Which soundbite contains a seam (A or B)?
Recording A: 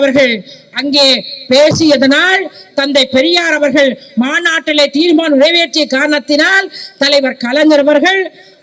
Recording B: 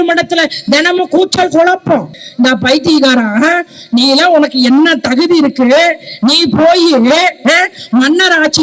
B